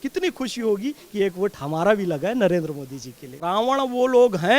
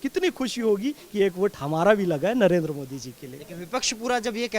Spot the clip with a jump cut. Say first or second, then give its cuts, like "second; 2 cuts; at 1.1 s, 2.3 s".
first; 1 cut; at 3.4 s